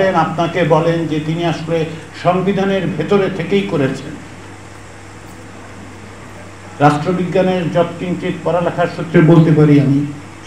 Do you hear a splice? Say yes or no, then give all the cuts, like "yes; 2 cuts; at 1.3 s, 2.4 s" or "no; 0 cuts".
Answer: no; 0 cuts